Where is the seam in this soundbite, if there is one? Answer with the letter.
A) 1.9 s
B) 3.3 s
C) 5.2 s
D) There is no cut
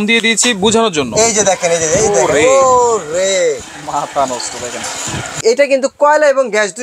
C